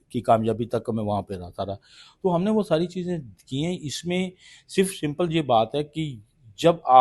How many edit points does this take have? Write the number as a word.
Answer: zero